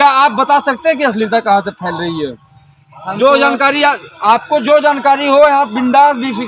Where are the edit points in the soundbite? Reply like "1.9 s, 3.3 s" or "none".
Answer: none